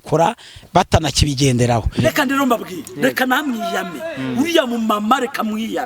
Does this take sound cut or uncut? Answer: cut